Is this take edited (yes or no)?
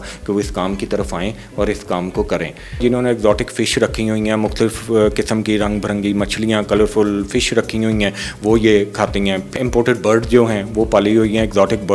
yes